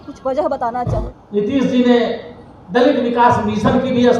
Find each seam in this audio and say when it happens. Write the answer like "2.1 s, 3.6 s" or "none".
1.1 s